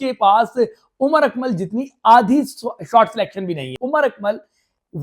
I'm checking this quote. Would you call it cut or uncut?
cut